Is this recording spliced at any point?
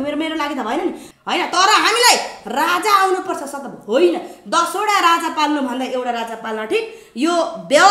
yes; 1 cut; at 1.0 s

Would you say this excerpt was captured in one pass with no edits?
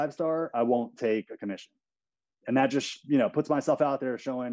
yes; 0 cuts

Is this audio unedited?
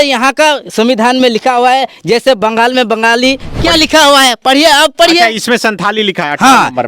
no; 1 cut; at 3.5 s

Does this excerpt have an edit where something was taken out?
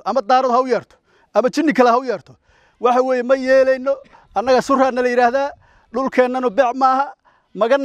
no; 0 cuts

